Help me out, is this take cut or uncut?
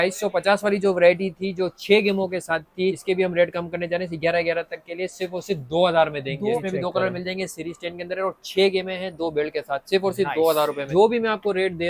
cut